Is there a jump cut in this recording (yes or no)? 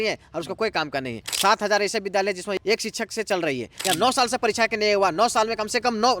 yes